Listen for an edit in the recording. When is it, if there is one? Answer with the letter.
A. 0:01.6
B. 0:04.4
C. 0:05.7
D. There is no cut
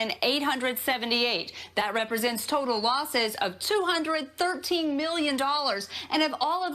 D